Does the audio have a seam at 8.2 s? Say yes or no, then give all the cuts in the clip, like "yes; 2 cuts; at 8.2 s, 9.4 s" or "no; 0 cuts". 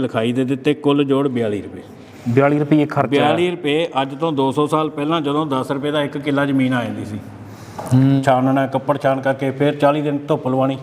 yes; 1 cut; at 8.2 s